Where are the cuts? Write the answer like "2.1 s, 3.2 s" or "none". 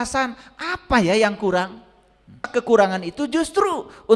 2.4 s